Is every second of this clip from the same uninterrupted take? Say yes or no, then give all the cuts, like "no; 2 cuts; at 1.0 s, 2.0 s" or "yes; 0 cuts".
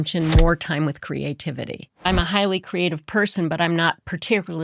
no; 1 cut; at 2.1 s